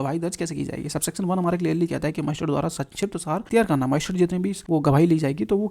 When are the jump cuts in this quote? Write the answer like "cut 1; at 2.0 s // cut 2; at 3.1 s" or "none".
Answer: cut 1; at 3.4 s // cut 2; at 4.5 s